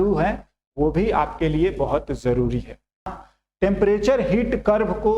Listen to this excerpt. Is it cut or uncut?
cut